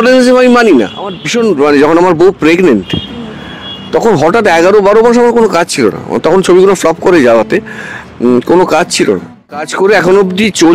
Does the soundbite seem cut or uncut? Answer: cut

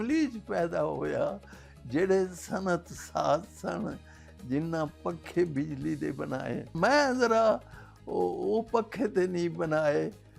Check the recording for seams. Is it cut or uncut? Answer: cut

